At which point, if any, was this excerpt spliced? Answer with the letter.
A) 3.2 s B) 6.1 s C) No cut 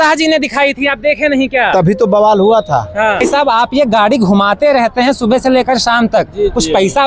A